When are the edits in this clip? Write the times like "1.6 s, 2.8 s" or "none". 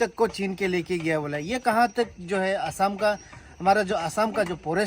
none